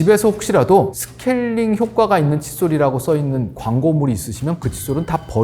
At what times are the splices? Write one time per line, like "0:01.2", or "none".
0:01.0